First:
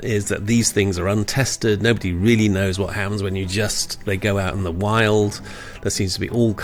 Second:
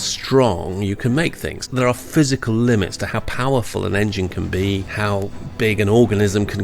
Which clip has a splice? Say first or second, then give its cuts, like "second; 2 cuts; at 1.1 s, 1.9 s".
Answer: second; 3 cuts; at 1.6 s, 3.1 s, 4.9 s